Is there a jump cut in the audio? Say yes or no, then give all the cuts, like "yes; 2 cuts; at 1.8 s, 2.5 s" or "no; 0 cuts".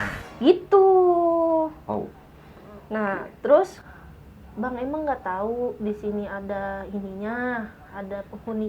yes; 1 cut; at 3.8 s